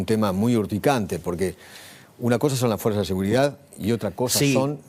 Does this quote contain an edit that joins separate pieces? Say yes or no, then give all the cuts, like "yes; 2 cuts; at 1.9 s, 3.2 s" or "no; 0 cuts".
no; 0 cuts